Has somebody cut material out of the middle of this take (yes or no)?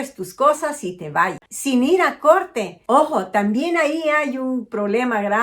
yes